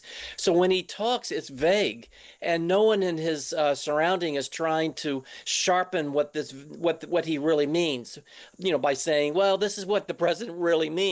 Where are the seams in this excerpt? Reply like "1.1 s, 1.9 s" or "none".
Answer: none

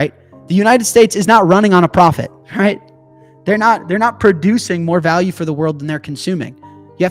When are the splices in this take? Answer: 2.4 s

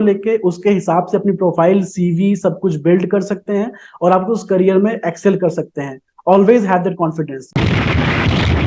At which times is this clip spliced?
7.5 s

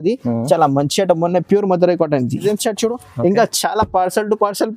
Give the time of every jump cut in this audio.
2.4 s

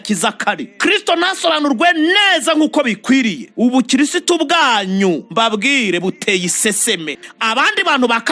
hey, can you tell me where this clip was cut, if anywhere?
7.1 s

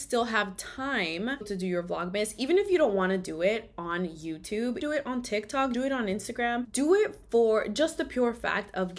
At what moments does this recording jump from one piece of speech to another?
1.5 s

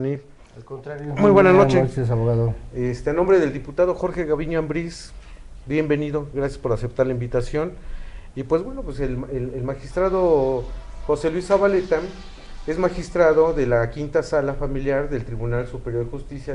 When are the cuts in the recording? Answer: 11.9 s

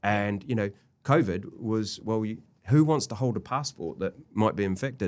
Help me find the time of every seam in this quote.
none

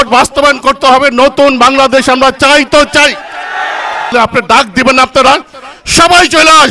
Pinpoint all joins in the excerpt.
4.1 s

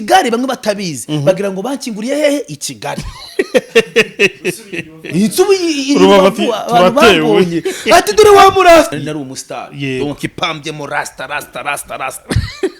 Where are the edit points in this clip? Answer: 8.9 s

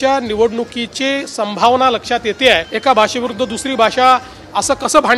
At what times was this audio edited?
2.7 s

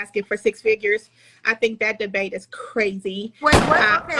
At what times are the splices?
3.2 s

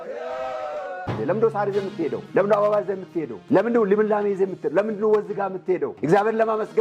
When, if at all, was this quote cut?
1.1 s

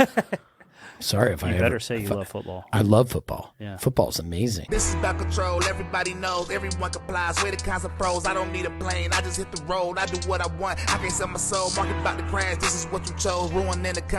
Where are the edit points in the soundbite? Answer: 4.6 s

